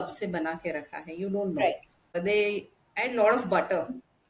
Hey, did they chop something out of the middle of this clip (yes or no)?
yes